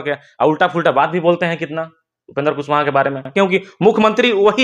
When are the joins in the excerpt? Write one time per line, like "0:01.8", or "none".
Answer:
0:03.3